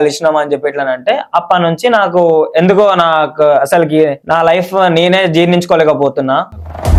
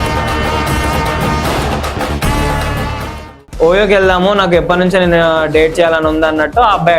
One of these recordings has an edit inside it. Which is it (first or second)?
second